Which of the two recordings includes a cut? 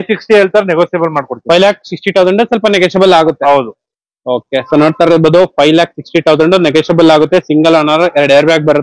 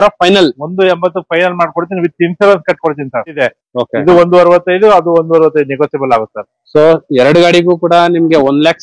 second; 1 cut; at 3.4 s

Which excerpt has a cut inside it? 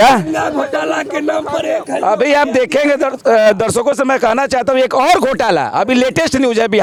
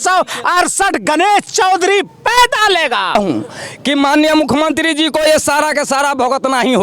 second; 1 cut; at 3.1 s

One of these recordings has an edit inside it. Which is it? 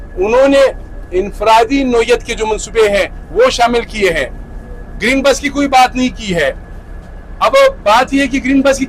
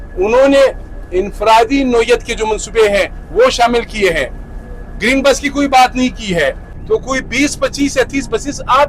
second; 1 cut; at 6.7 s

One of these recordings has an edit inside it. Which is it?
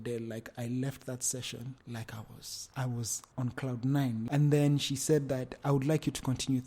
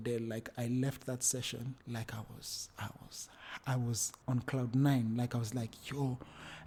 first; 2 cuts; at 2.5 s, 4.2 s

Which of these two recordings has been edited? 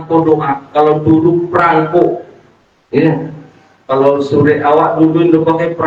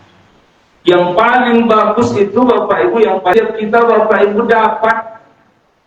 second; 1 cut; at 3.3 s

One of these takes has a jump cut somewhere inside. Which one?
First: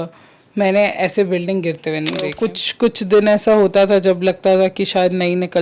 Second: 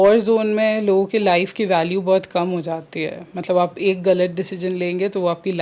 first; 1 cut; at 2.3 s

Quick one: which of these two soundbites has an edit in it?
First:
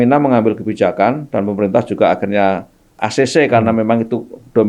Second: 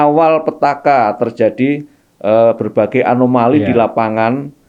first; 1 cut; at 3.0 s

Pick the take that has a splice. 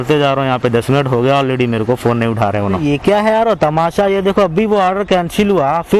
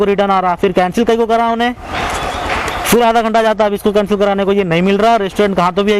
first; 1 cut; at 2.8 s

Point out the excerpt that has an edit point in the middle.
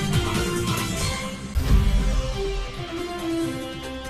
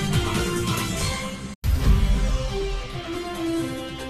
second; 1 cut; at 1.0 s

